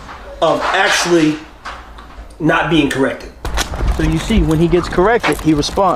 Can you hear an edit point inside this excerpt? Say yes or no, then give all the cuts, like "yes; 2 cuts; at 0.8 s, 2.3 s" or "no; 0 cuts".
yes; 1 cut; at 3.3 s